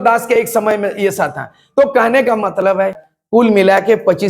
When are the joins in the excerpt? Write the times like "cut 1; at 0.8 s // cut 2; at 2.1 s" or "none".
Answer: cut 1; at 3.0 s